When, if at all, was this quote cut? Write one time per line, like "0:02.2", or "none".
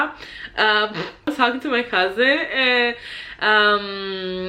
0:01.3